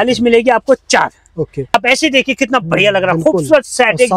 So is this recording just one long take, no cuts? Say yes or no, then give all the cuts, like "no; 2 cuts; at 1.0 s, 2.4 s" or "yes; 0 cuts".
no; 1 cut; at 1.7 s